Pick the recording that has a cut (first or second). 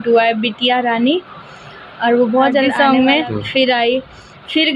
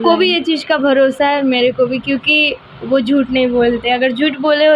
first